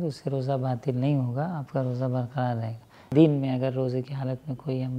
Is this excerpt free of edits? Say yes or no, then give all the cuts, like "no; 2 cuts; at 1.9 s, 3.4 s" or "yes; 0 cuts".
no; 1 cut; at 3.1 s